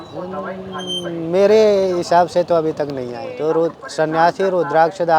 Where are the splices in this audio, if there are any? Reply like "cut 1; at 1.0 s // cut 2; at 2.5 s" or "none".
cut 1; at 3.2 s